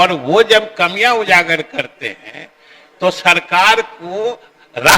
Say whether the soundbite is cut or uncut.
uncut